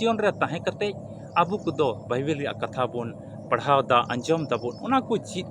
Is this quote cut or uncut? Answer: uncut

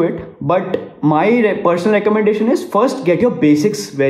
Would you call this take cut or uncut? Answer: uncut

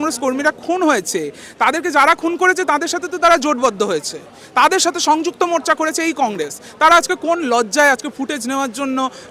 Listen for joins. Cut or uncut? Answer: uncut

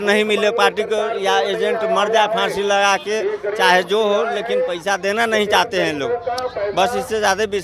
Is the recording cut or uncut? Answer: uncut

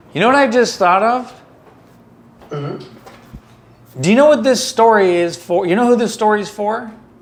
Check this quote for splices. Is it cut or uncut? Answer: uncut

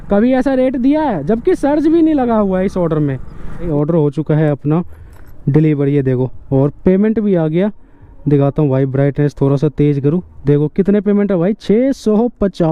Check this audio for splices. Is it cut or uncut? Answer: cut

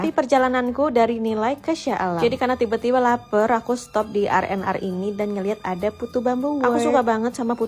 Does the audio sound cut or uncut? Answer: uncut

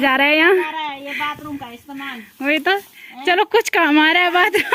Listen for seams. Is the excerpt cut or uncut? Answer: uncut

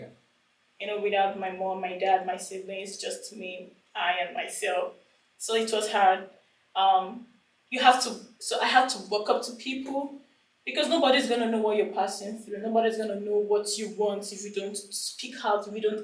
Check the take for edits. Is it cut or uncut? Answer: uncut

